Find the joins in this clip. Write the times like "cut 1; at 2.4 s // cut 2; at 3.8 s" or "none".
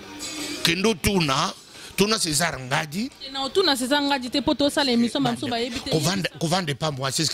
cut 1; at 5.8 s